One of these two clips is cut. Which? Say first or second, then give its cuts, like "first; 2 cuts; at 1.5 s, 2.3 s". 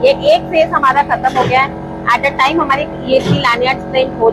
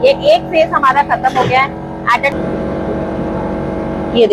second; 1 cut; at 2.3 s